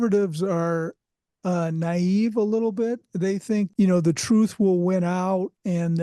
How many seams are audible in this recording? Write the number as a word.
one